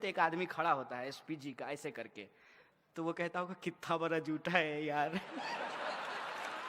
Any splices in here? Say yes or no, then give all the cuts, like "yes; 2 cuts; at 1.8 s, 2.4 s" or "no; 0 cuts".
no; 0 cuts